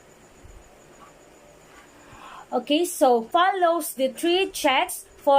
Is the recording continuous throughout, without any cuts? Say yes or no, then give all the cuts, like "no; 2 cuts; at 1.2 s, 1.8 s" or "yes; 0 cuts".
no; 1 cut; at 3.3 s